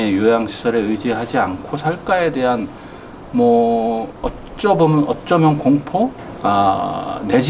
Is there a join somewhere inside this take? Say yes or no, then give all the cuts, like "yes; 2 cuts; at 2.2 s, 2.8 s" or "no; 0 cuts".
yes; 1 cut; at 6.3 s